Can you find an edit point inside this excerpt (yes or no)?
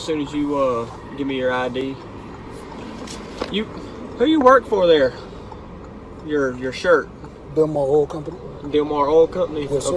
no